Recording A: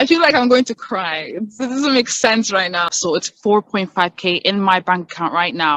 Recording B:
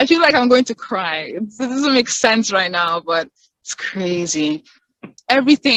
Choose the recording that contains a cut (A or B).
A